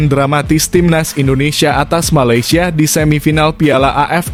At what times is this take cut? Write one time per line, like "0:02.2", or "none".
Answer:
none